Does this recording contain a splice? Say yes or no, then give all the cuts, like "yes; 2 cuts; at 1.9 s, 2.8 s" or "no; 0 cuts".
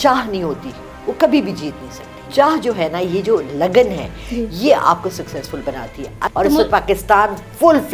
yes; 2 cuts; at 2.3 s, 6.3 s